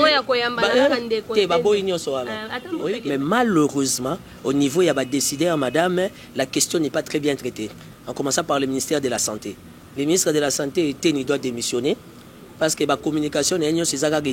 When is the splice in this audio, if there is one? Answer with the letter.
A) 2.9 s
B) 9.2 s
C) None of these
A